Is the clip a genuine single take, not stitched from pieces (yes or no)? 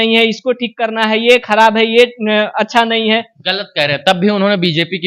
yes